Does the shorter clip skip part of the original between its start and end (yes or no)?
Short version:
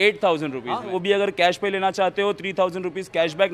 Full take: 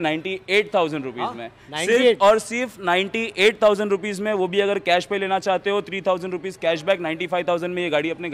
yes